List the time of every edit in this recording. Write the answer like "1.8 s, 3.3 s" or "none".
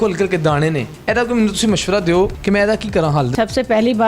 0.9 s, 2.4 s, 3.3 s